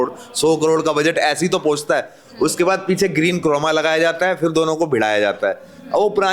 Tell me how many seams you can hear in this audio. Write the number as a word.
zero